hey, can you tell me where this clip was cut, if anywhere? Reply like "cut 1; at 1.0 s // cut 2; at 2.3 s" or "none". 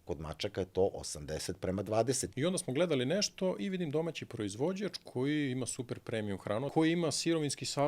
cut 1; at 2.2 s // cut 2; at 6.7 s